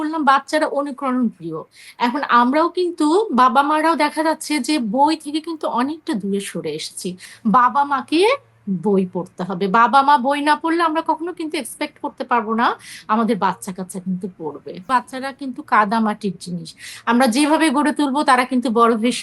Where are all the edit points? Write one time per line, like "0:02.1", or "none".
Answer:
0:07.3
0:14.9

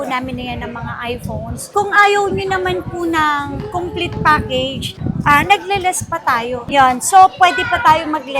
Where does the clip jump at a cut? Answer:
0:01.6

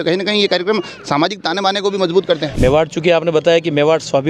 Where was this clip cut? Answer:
0:02.5

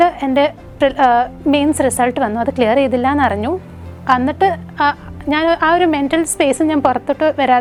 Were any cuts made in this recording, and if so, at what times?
none

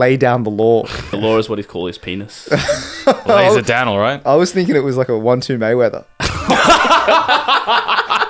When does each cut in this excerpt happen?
0:01.0

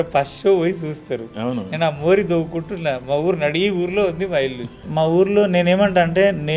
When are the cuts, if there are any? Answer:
0:04.8

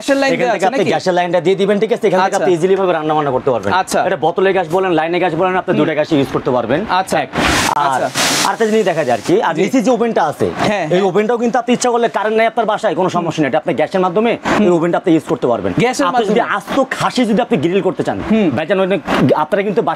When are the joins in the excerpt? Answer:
none

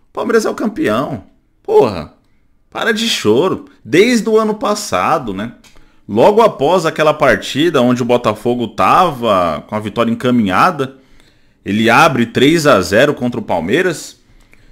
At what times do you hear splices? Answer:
none

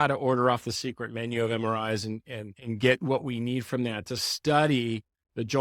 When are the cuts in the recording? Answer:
0:02.5

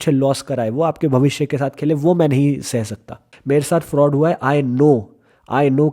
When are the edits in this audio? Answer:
0:03.3

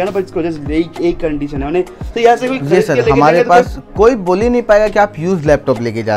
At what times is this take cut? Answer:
none

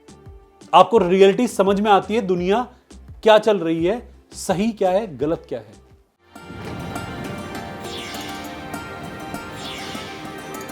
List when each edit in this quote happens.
0:06.0

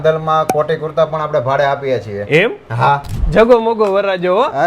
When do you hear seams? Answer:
0:03.1

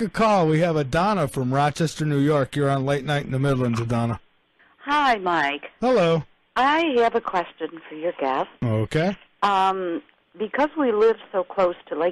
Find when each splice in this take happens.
none

